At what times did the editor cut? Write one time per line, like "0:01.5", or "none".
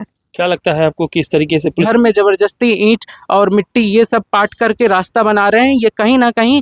0:01.8